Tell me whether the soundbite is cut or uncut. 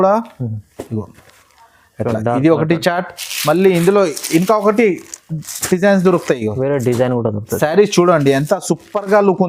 uncut